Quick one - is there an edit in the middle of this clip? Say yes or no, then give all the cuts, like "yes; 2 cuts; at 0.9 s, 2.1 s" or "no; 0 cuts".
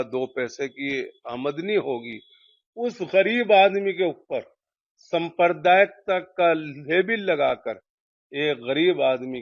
no; 0 cuts